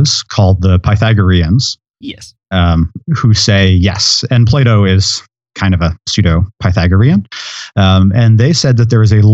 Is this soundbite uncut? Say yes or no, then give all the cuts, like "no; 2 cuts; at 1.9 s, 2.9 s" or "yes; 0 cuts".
yes; 0 cuts